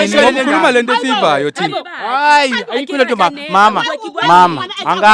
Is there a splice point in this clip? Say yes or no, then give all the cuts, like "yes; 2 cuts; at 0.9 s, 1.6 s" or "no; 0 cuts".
no; 0 cuts